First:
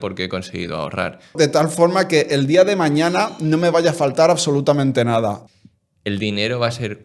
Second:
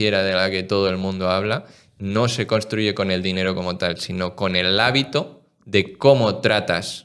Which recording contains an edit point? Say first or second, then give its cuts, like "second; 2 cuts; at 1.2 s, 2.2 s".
first; 2 cuts; at 1.3 s, 5.4 s